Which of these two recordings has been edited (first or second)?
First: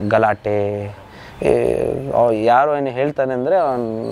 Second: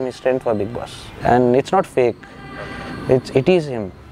second